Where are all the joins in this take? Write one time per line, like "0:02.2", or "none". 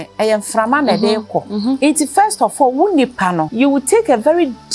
0:01.8
0:03.5